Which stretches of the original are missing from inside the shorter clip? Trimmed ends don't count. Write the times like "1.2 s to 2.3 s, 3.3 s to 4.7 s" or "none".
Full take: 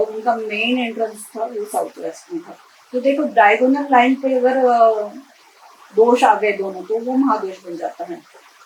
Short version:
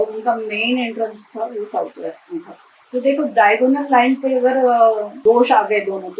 5.1 s to 5.8 s